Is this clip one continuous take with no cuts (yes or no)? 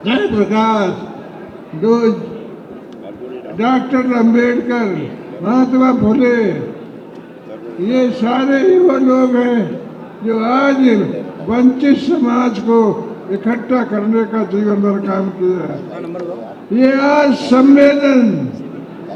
yes